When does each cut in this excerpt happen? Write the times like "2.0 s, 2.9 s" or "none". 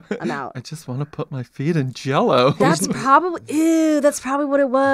none